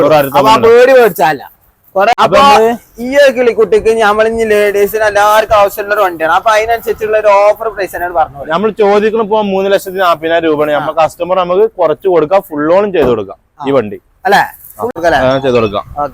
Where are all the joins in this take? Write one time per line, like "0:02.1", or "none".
0:02.1
0:14.9